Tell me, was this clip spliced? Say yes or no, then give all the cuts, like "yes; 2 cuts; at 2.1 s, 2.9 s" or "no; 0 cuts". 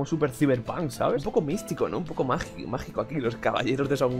yes; 1 cut; at 1.3 s